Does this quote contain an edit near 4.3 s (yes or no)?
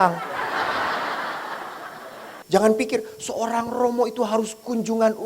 no